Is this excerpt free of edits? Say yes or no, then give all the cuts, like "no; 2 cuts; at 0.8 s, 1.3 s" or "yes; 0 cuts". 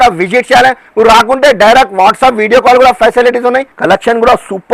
no; 1 cut; at 3.7 s